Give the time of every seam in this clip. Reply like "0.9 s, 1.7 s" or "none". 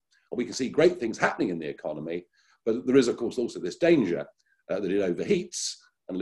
none

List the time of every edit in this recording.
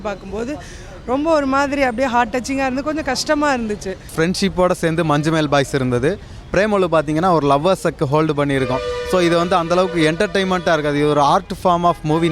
4.1 s

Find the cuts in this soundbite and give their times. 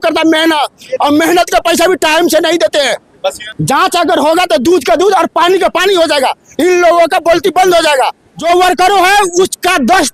3.5 s, 8.3 s

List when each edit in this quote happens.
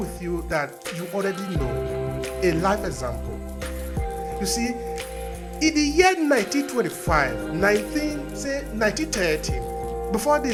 none

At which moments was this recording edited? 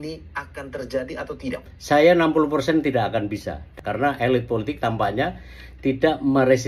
3.7 s

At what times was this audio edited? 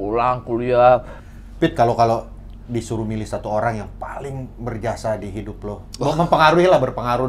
1.2 s

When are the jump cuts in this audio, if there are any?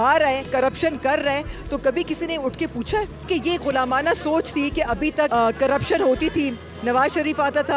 3.2 s

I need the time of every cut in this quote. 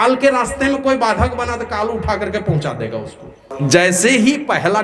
3.5 s

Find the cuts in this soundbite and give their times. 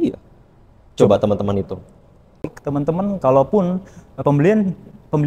2.5 s

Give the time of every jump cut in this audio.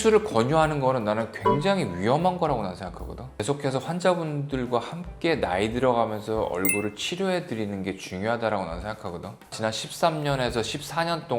3.3 s, 9.5 s

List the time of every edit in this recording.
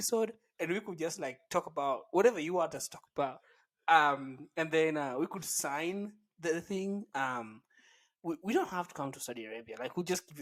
none

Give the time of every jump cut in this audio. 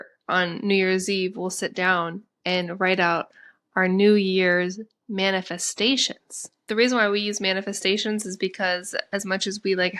6.5 s

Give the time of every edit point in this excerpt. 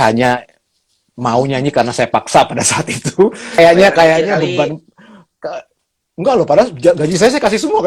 3.6 s

